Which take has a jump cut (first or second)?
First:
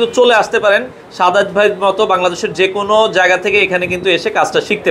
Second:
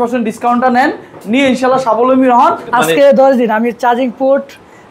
second